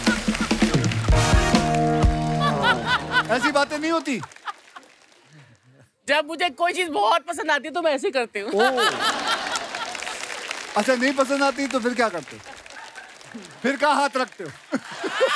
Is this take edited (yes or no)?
no